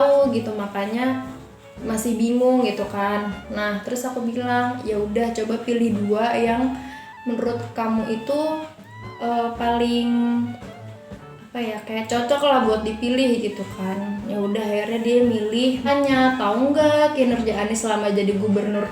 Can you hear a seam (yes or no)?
yes